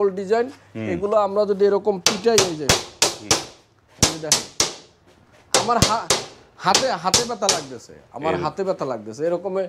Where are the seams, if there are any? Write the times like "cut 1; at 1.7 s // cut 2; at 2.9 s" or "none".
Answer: none